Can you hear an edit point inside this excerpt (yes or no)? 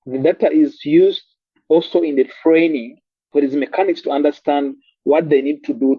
no